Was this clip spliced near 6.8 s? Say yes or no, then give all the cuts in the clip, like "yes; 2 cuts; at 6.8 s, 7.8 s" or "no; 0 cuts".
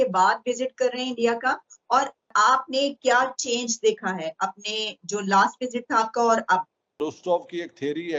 yes; 1 cut; at 6.8 s